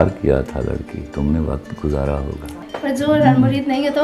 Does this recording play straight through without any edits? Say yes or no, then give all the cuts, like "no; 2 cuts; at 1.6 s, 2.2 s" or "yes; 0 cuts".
no; 2 cuts; at 1.0 s, 2.5 s